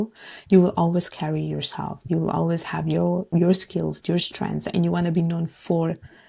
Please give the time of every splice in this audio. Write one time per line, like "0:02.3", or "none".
none